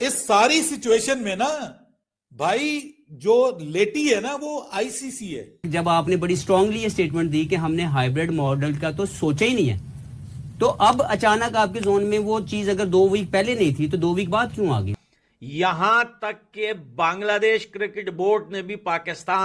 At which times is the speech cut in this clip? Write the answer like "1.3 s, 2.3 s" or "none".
5.6 s, 15.0 s